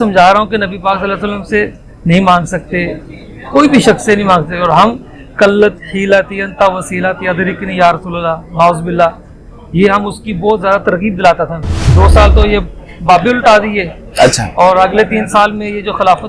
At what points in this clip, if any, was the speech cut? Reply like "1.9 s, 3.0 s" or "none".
11.8 s